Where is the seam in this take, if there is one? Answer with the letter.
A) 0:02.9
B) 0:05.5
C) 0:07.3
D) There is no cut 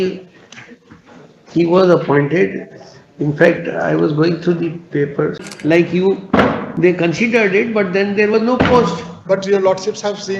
B